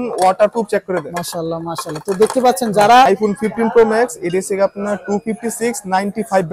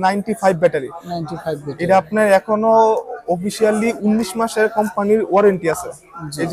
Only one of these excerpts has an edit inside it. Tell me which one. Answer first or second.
first